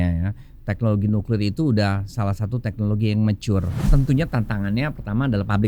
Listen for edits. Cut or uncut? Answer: cut